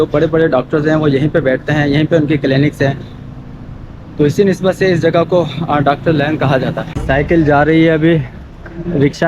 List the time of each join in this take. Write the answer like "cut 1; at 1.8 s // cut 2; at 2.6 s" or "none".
cut 1; at 7.0 s